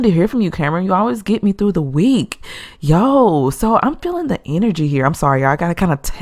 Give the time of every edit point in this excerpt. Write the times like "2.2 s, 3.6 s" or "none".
none